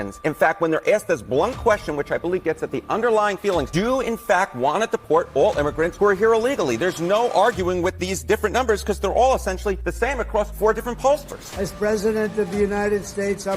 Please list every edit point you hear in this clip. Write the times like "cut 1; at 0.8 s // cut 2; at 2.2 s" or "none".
cut 1; at 11.5 s